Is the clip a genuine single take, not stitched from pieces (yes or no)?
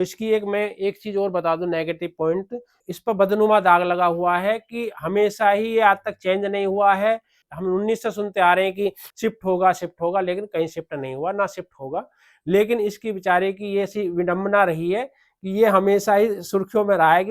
no